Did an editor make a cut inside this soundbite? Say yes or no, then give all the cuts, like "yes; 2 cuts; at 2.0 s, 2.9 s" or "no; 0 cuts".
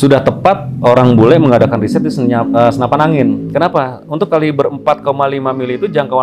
no; 0 cuts